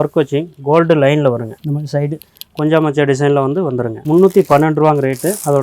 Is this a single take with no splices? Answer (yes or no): yes